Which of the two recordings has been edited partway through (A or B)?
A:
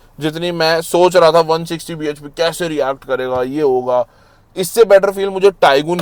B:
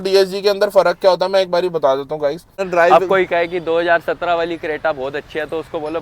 B